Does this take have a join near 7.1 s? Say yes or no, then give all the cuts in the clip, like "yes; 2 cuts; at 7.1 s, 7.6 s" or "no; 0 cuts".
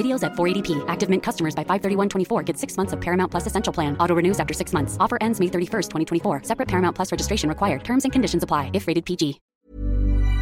no; 1 cut; at 9.5 s